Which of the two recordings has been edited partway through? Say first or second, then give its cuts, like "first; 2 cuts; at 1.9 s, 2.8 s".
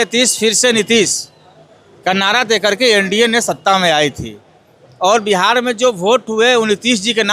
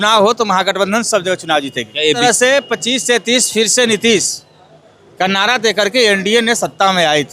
second; 1 cut; at 2.2 s